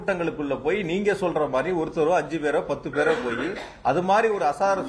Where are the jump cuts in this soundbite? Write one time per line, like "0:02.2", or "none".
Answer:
none